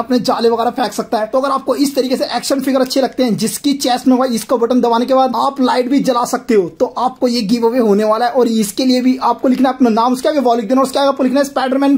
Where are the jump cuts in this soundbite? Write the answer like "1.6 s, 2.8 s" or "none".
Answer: none